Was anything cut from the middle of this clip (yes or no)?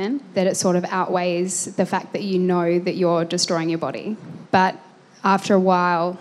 no